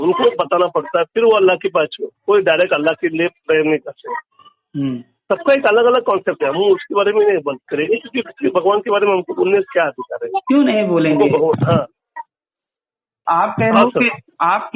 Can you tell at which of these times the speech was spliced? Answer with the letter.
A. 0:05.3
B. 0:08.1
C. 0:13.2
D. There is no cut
C